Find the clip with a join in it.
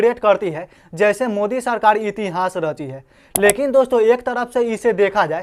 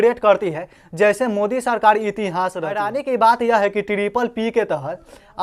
second; 1 cut; at 2.9 s

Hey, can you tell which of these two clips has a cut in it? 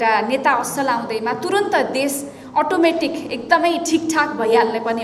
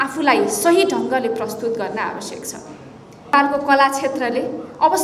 second; 1 cut; at 3.3 s

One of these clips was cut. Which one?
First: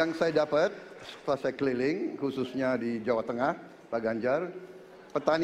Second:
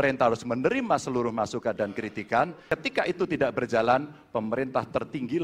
second; 1 cut; at 2.6 s

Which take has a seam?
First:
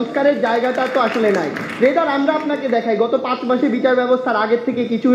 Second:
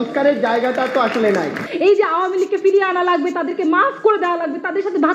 second; 1 cut; at 1.7 s

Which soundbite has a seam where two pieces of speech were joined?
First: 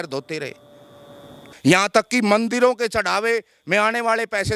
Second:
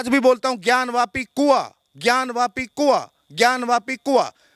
first; 1 cut; at 1.4 s

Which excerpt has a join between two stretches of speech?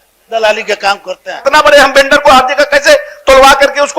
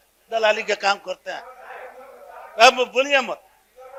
first; 1 cut; at 1.4 s

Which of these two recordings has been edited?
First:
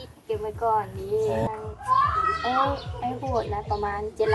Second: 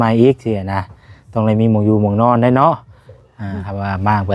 first; 1 cut; at 1.5 s

